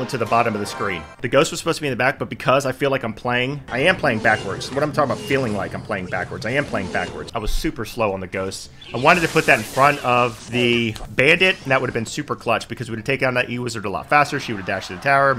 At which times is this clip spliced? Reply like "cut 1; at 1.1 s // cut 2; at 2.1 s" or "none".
cut 1; at 1.0 s // cut 2; at 3.6 s // cut 3; at 7.2 s